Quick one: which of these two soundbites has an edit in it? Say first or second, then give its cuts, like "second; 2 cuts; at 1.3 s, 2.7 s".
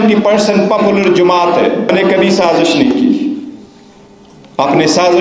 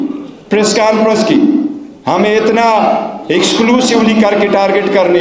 first; 1 cut; at 1.9 s